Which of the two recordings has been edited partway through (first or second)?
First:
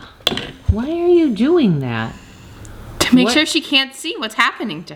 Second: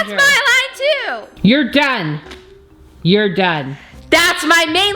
second